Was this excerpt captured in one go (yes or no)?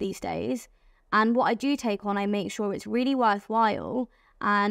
yes